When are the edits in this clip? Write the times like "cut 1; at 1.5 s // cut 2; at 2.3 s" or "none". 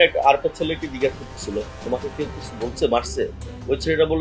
cut 1; at 1.8 s